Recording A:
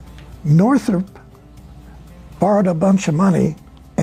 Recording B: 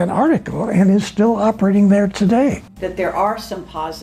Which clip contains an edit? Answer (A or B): B